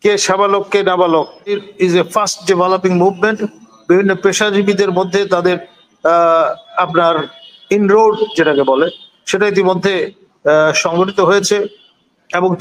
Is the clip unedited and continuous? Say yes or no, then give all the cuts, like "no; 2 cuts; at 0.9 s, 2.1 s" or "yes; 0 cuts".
no; 1 cut; at 1.5 s